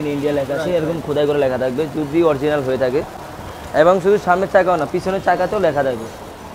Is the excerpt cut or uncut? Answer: uncut